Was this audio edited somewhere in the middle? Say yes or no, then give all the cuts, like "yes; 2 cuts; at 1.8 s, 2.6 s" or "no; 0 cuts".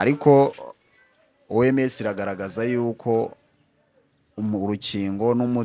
no; 0 cuts